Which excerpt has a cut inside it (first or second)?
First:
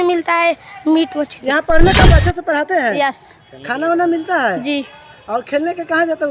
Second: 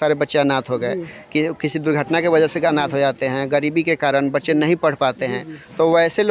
first